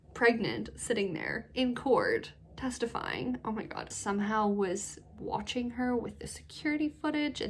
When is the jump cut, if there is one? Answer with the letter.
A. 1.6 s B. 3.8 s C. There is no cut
B